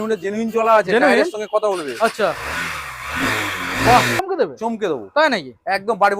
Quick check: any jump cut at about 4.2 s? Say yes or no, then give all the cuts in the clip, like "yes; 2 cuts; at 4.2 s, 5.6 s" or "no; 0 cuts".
yes; 1 cut; at 4.2 s